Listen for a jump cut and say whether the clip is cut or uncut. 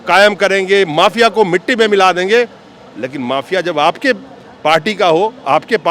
uncut